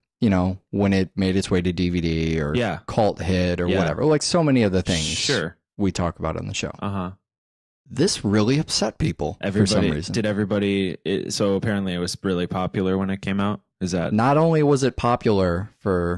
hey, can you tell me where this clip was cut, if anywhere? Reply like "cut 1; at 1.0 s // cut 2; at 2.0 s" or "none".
none

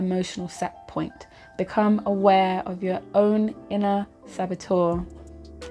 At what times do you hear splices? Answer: none

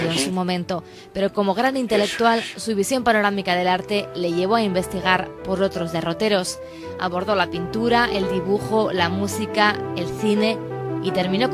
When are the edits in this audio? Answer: cut 1; at 8.4 s

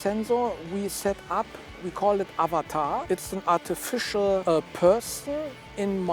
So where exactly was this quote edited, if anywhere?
cut 1; at 1.8 s // cut 2; at 3.0 s // cut 3; at 4.4 s

